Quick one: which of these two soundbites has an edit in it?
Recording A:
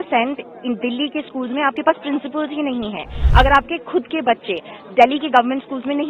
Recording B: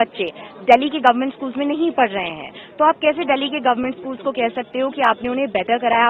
A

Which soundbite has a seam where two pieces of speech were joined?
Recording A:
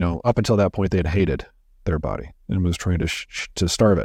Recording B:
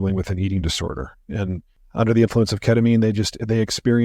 B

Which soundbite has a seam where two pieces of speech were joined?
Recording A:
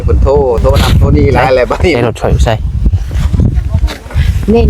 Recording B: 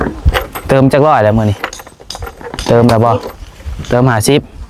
A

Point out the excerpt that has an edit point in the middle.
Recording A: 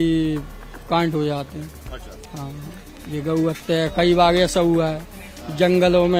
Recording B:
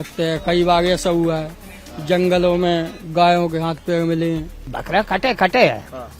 B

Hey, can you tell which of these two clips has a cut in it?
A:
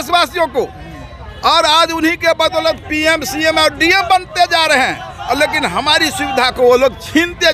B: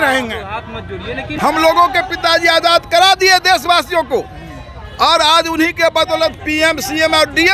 B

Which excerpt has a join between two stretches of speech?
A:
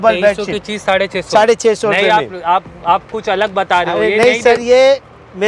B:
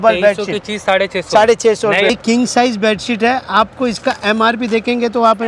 B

